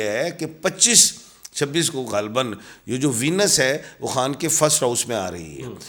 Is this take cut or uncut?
uncut